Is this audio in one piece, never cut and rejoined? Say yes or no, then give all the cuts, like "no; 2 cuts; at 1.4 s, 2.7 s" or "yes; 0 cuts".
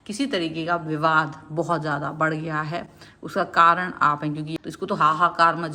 no; 1 cut; at 4.6 s